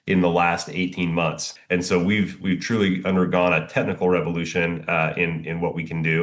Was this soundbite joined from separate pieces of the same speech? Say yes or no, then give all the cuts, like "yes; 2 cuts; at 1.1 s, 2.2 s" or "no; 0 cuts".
yes; 1 cut; at 1.5 s